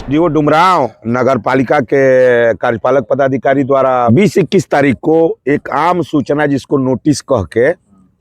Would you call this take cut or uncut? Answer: cut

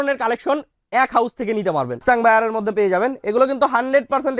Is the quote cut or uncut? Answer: cut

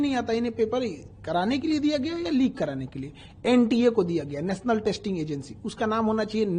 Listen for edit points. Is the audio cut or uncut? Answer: uncut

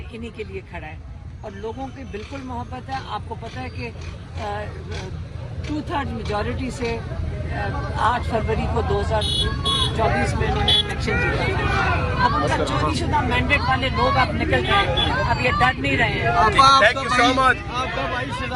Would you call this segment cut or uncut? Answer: uncut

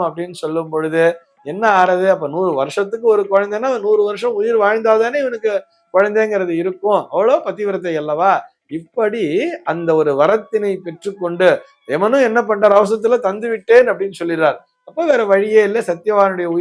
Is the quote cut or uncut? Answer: uncut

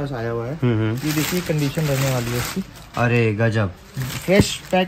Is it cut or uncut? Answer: uncut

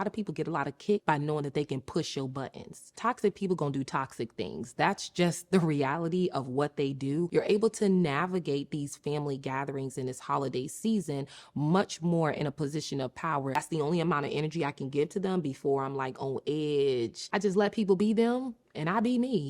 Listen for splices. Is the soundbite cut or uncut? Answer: cut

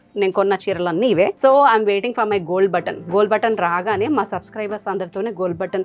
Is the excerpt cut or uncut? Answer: cut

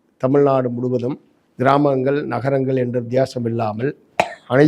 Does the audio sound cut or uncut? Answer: uncut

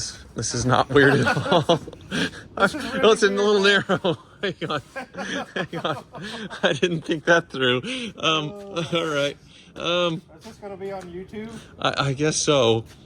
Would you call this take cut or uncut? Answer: uncut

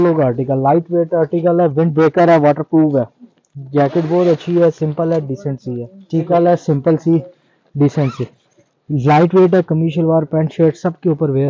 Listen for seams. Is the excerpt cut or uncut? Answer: cut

